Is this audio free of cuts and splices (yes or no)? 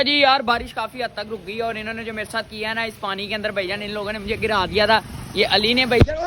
yes